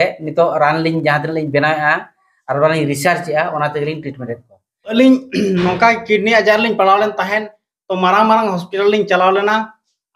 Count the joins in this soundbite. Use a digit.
1